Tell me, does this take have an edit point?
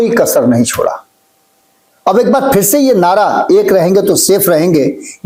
no; 0 cuts

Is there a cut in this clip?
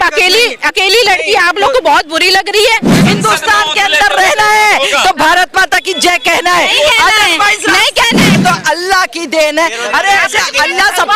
yes; 2 cuts; at 3.0 s, 8.4 s

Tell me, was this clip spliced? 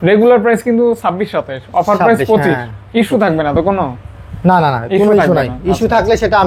no; 0 cuts

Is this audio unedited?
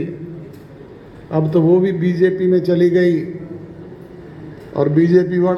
yes; 0 cuts

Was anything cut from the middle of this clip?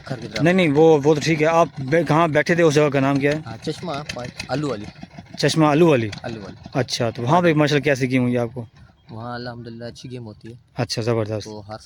no; 0 cuts

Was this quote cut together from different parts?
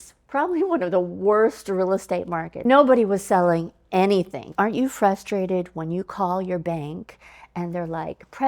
yes; 2 cuts; at 2.5 s, 4.5 s

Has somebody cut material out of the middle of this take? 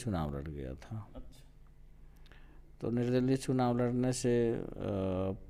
no; 0 cuts

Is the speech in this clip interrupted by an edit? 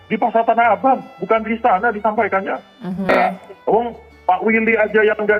yes; 1 cut; at 3.0 s

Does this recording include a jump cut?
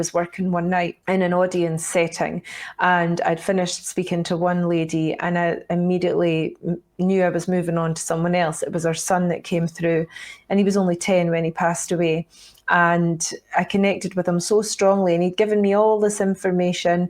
yes; 1 cut; at 1.0 s

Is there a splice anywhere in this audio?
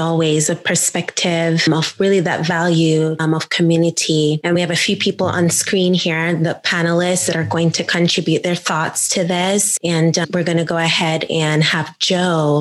no; 0 cuts

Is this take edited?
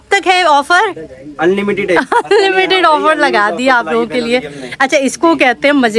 no; 0 cuts

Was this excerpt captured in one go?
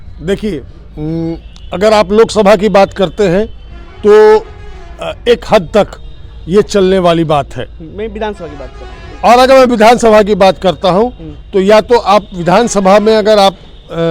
yes; 0 cuts

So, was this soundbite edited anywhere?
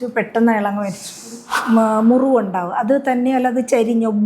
yes; 1 cut; at 1.5 s

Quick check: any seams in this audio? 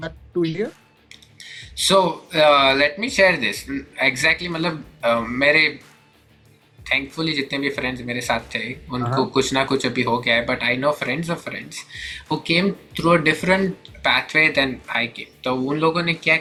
no; 0 cuts

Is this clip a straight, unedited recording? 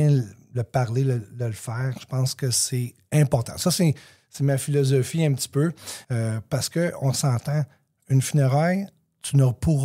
no; 1 cut; at 5.9 s

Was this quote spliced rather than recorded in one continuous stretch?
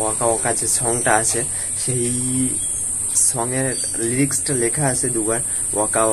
no; 0 cuts

